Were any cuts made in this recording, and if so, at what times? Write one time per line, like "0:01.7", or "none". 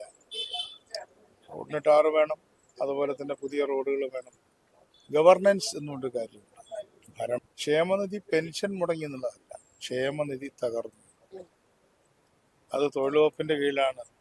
0:07.4